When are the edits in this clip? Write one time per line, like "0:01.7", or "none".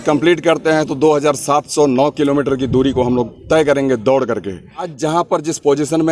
0:04.9

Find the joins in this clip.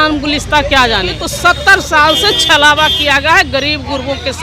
0:01.2

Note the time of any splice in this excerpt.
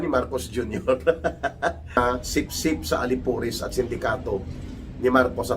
0:02.0

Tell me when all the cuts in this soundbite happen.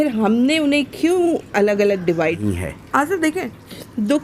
0:02.4

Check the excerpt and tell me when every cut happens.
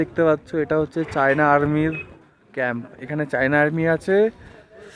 none

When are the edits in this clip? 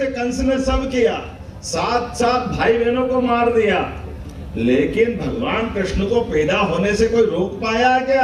none

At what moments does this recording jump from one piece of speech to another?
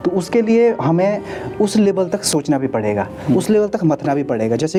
none

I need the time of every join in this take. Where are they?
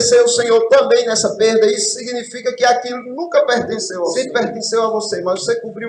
0:04.1

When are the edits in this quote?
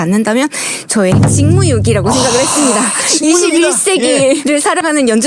0:01.3
0:04.4

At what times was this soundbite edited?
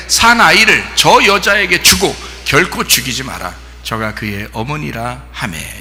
none

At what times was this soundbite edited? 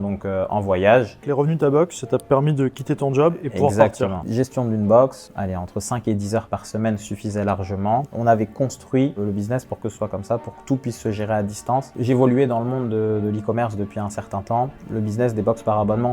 0:01.3
0:04.2
0:05.3
0:08.0
0:11.9

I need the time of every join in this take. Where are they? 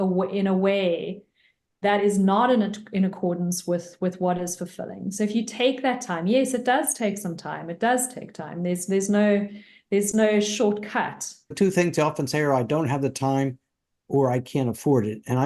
0:11.5

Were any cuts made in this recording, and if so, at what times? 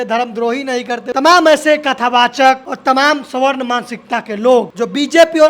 0:01.1
0:02.7
0:04.7

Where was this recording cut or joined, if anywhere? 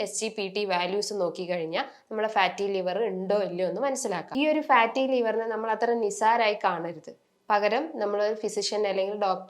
0:04.2

